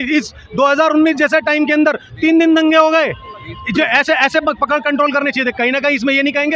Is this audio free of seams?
yes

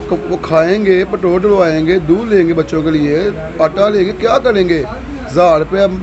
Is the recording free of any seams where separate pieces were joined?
yes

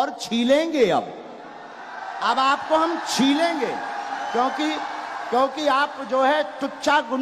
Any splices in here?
no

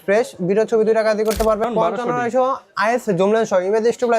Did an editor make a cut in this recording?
yes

